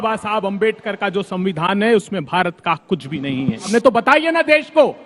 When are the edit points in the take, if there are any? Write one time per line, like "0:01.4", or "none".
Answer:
0:03.7